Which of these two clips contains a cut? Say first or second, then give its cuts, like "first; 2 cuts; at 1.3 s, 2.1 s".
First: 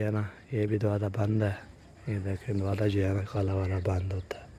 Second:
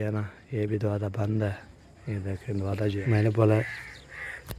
second; 1 cut; at 3.0 s